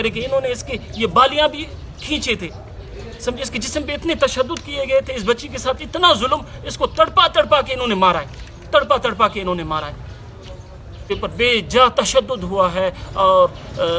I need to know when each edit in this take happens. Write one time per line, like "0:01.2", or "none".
0:11.0